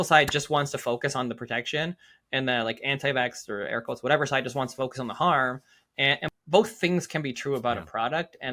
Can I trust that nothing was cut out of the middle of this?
yes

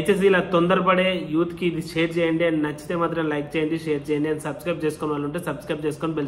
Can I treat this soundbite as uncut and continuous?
yes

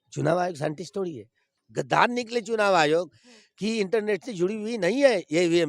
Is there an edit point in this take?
yes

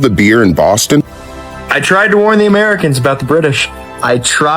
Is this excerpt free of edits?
no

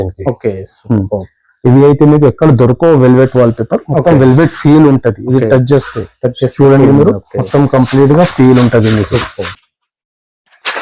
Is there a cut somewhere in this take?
yes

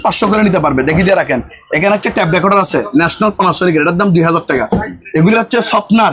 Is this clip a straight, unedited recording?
yes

